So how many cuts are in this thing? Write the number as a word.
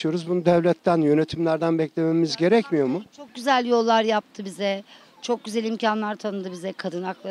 zero